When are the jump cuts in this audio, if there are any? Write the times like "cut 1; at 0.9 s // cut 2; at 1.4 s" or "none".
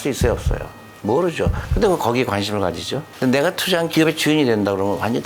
cut 1; at 3.0 s // cut 2; at 3.9 s